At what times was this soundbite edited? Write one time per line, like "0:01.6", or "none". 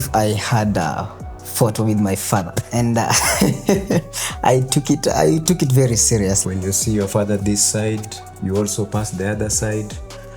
0:06.4